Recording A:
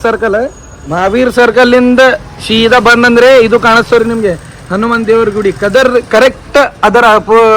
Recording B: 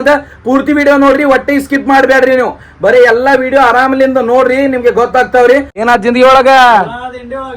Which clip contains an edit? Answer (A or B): B